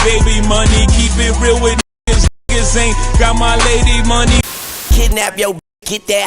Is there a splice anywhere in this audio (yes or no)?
yes